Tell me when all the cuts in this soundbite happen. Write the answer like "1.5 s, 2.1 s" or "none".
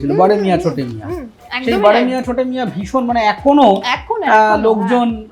none